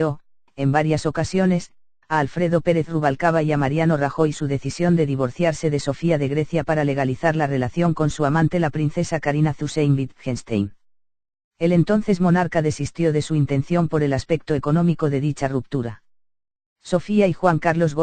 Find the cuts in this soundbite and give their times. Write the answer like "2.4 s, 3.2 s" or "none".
none